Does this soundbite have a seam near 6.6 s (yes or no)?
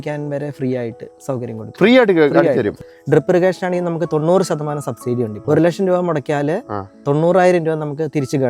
no